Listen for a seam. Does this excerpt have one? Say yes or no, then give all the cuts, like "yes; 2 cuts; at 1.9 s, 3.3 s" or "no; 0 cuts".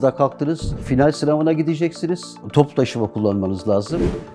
yes; 2 cuts; at 0.9 s, 2.3 s